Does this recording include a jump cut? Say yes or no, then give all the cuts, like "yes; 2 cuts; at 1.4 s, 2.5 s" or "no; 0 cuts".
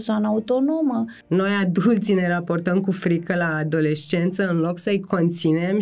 yes; 1 cut; at 1.2 s